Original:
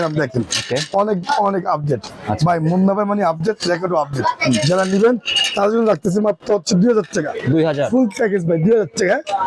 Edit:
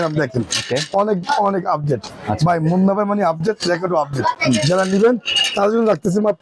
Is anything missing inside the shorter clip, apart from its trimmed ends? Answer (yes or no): no